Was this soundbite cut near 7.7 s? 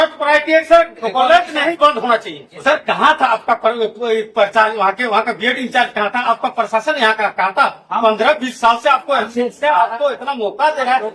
no; 1 cut; at 2.5 s

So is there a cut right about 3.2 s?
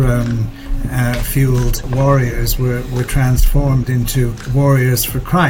no; 2 cuts; at 1.8 s, 4.4 s

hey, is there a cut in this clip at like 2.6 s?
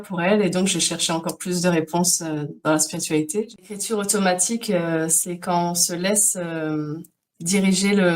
no; 1 cut; at 3.8 s

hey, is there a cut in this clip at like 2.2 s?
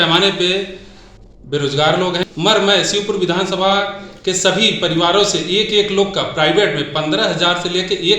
yes; 1 cut; at 2.2 s

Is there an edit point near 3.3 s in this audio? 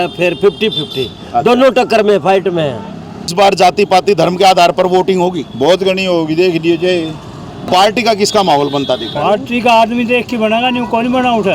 yes; 2 cuts; at 3.3 s, 7.6 s

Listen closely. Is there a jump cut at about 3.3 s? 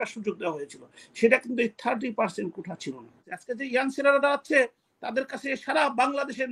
yes; 1 cut; at 3.3 s

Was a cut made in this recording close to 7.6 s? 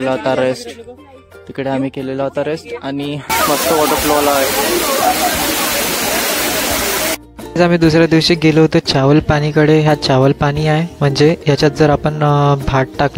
yes; 2 cuts; at 3.3 s, 7.6 s

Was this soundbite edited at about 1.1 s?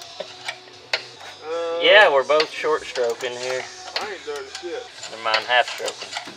yes; 2 cuts; at 1.1 s, 4.9 s

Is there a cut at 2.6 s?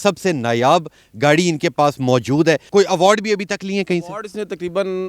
yes; 1 cut; at 2.6 s

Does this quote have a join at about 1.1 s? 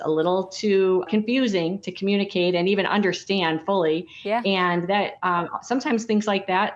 yes; 1 cut; at 1.1 s

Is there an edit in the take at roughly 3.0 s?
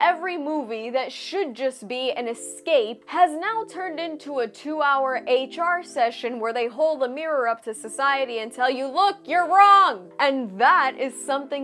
yes; 1 cut; at 3.0 s

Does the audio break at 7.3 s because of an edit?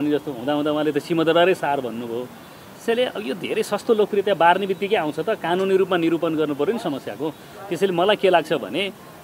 no; 0 cuts

